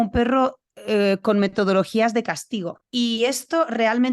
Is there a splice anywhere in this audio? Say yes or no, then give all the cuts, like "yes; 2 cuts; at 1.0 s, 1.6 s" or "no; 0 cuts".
yes; 1 cut; at 2.8 s